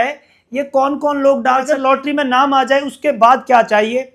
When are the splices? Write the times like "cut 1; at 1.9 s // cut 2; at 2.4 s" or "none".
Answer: cut 1; at 1.7 s